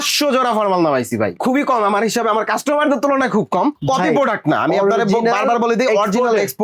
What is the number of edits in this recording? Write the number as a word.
two